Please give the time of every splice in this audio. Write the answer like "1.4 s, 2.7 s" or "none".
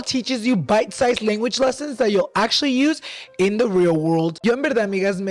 none